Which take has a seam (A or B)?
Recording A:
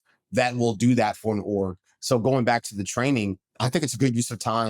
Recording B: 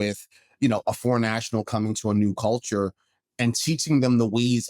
A